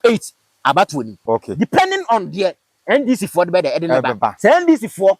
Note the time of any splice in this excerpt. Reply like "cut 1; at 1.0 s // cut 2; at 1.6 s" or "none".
cut 1; at 1.2 s // cut 2; at 4.4 s